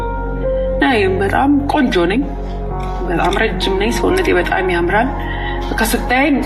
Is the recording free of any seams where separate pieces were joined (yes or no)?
yes